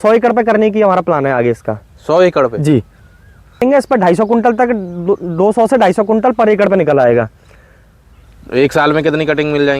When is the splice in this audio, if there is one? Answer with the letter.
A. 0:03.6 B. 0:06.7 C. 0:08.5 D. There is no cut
A